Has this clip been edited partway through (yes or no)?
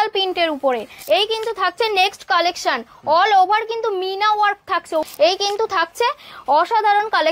yes